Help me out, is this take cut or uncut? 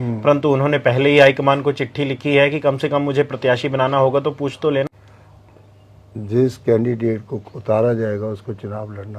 cut